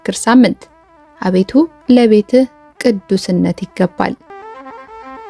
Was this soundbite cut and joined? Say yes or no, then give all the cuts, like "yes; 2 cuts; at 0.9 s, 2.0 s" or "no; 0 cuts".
yes; 1 cut; at 4.3 s